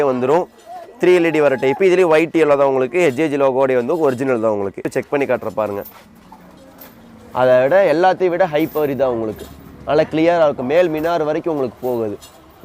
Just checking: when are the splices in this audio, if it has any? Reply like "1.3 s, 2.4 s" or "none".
4.9 s